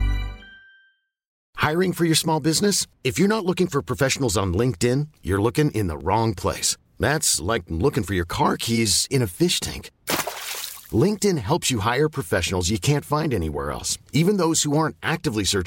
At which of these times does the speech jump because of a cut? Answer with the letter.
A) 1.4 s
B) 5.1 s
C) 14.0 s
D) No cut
A